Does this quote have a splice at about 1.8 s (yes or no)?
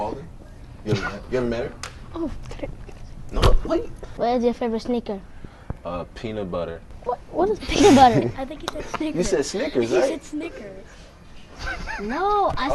yes